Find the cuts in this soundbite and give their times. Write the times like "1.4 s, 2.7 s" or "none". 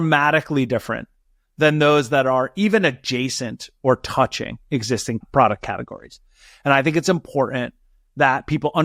5.2 s